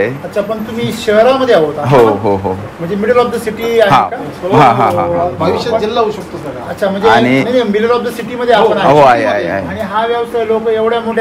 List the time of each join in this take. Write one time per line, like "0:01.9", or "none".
none